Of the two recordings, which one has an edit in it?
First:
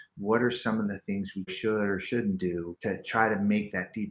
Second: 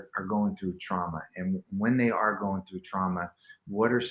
first; 2 cuts; at 1.5 s, 2.7 s

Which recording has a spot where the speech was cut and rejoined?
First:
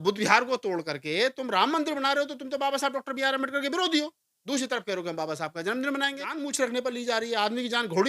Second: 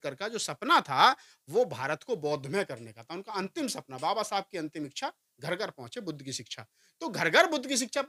first; 1 cut; at 6.5 s

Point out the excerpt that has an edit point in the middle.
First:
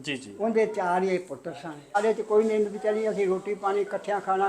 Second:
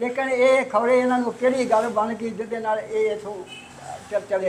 first; 1 cut; at 2.0 s

